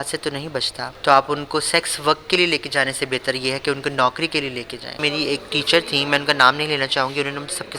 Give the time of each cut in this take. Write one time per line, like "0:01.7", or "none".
0:00.9
0:05.0